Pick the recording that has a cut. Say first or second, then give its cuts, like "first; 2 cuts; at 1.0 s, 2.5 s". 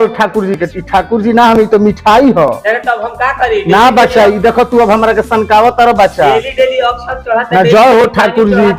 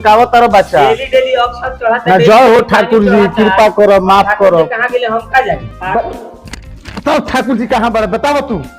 second; 1 cut; at 5.6 s